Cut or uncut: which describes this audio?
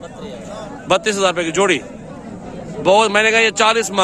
uncut